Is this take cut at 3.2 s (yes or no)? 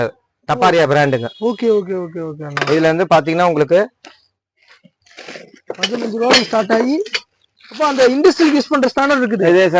no